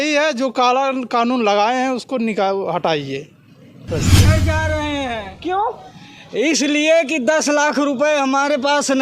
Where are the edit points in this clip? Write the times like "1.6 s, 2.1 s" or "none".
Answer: 4.2 s